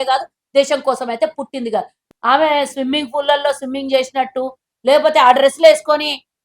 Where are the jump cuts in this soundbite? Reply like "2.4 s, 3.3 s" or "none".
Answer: 2.0 s